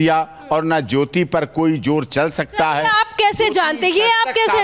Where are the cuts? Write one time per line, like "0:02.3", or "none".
none